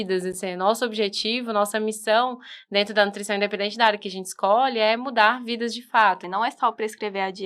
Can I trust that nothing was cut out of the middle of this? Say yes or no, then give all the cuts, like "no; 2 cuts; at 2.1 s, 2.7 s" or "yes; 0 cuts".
no; 1 cut; at 6.2 s